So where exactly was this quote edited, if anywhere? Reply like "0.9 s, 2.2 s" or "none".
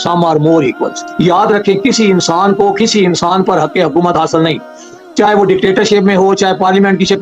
1.0 s